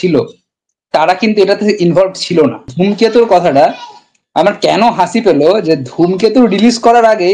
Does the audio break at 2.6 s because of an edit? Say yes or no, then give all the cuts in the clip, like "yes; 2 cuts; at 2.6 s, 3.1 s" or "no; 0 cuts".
yes; 1 cut; at 2.6 s